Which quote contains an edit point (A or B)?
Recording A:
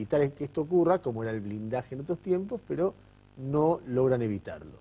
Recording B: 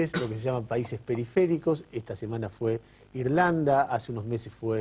B